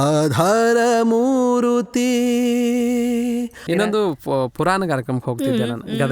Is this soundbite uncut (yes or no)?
no